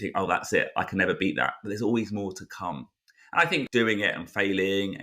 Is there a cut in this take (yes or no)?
yes